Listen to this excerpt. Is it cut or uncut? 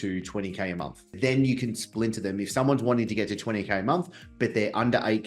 cut